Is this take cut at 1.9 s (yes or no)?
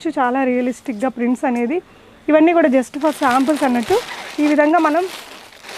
no